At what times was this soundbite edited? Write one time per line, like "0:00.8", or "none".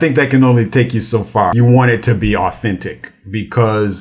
0:01.5